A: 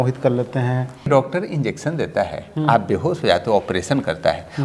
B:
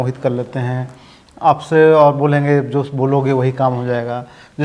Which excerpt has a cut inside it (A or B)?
A